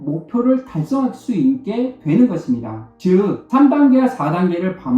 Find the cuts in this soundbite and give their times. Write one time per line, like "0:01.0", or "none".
0:03.0